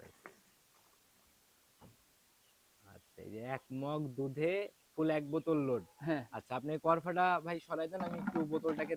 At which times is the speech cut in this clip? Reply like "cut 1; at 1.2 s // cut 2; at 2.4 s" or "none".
none